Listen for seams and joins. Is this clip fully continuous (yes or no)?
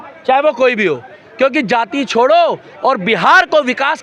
yes